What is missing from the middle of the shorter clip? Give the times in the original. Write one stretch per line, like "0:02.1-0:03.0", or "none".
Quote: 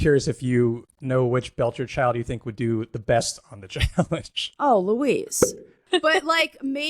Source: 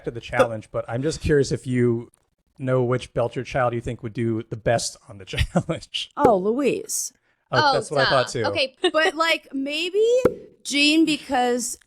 0:02.2-0:02.5
0:07.4-0:08.7

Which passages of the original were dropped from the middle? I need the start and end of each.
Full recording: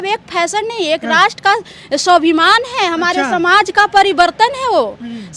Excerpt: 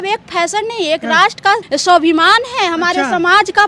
0:01.6-0:01.8

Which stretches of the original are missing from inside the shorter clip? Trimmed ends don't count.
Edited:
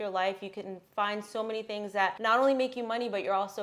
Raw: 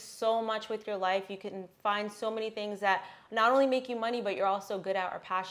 0:03.0-0:03.3

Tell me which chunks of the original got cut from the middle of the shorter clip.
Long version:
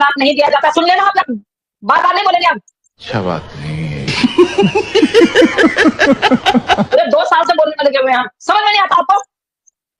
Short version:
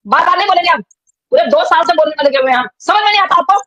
0:03.1-0:06.9

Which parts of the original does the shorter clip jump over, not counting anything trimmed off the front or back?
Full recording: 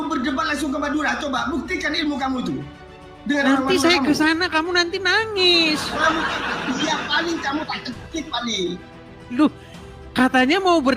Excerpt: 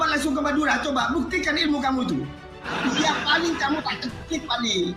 0:03.0-0:06.5

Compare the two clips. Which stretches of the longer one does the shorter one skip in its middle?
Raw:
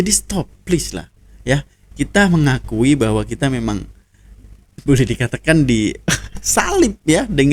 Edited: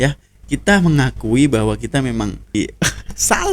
0:04.0-0:05.8

